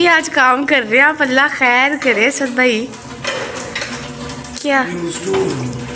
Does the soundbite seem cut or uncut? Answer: uncut